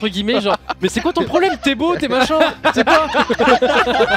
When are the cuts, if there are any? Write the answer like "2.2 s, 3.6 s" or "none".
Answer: none